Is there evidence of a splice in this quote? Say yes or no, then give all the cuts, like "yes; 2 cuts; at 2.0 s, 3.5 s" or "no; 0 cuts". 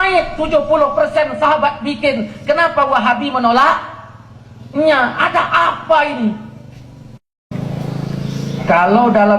yes; 1 cut; at 7.5 s